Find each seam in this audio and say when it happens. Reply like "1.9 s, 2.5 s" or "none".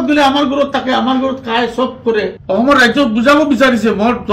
2.4 s

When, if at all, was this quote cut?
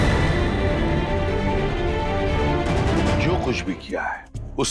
3.3 s

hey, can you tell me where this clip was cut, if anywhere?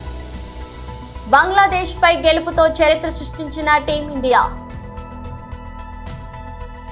none

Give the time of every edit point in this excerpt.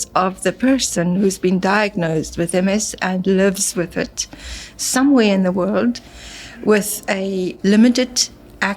7.5 s

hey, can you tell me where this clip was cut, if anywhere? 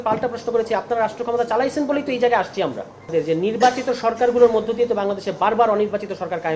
3.0 s

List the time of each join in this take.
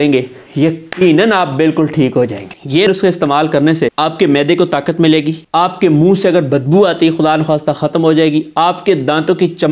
2.9 s, 3.9 s, 5.4 s

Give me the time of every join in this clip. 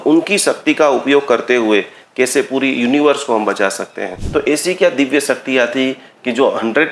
4.1 s

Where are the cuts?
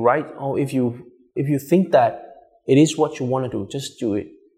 1.1 s

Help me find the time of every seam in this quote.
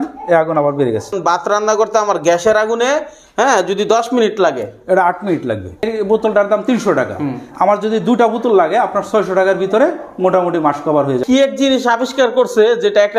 1.2 s, 5.9 s, 11.2 s

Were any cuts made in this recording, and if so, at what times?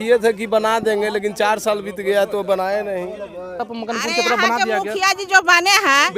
3.4 s

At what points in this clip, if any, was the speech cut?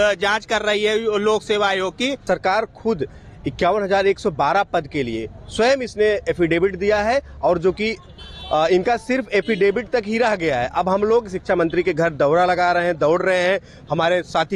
2.2 s

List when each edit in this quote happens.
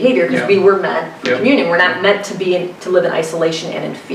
none

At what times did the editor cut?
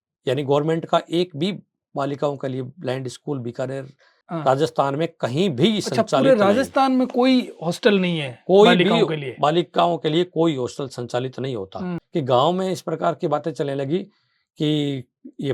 12.0 s

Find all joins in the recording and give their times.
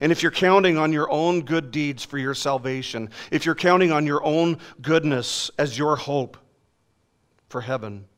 none

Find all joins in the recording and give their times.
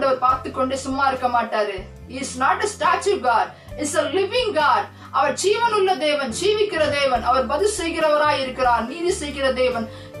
none

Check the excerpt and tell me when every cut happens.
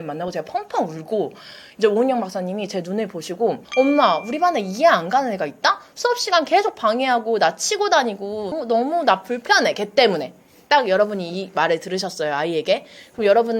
3.7 s

